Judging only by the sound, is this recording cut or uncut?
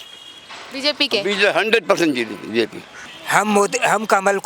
cut